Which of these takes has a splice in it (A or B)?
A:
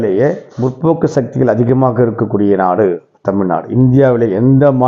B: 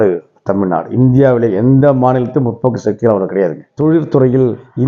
B